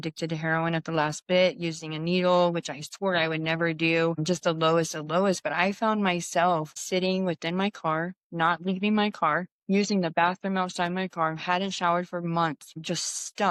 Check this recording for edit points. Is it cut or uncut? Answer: uncut